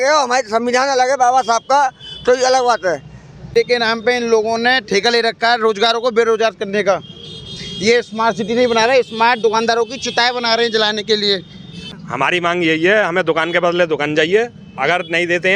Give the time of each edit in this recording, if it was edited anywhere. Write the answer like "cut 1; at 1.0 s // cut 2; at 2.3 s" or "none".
cut 1; at 3.5 s // cut 2; at 11.9 s